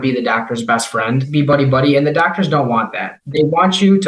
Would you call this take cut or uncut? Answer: cut